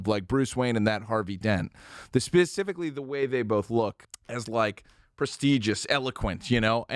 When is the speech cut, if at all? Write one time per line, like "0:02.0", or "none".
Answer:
0:04.1